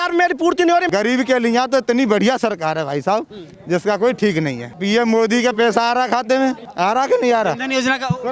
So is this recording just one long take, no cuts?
no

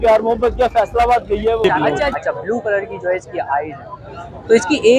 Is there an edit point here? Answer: yes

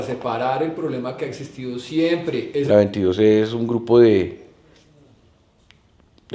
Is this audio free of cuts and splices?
no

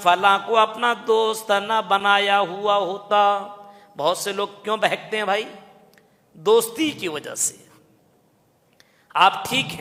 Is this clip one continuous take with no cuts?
yes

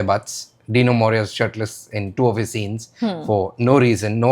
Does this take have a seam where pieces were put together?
no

